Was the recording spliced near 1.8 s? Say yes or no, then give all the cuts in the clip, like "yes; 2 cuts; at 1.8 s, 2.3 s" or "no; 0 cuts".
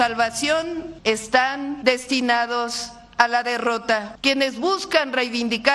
yes; 3 cuts; at 0.9 s, 1.8 s, 4.1 s